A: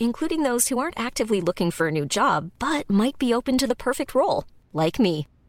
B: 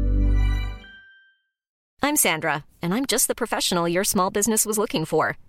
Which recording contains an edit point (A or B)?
B